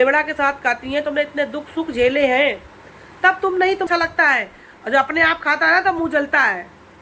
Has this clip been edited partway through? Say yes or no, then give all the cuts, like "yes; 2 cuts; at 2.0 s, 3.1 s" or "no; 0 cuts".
yes; 1 cut; at 3.9 s